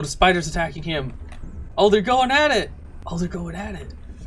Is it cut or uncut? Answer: cut